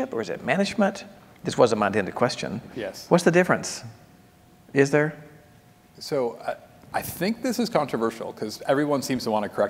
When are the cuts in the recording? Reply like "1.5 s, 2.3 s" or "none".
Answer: none